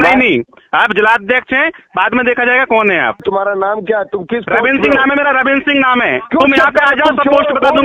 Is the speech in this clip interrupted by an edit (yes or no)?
yes